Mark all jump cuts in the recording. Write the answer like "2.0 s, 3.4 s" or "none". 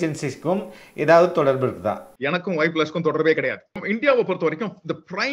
2.1 s, 3.8 s

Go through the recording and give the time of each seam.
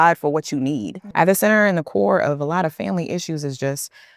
1.0 s

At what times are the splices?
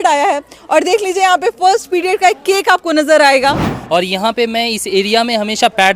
3.7 s

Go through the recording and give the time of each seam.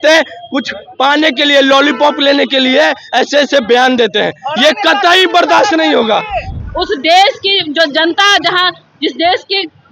6.5 s

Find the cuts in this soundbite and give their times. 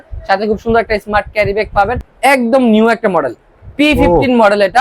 2.0 s

